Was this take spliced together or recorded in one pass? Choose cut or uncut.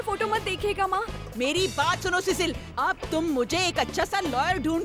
cut